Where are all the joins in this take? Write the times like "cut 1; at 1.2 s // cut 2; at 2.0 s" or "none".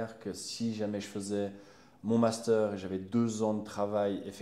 none